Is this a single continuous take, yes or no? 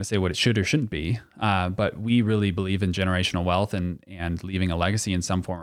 yes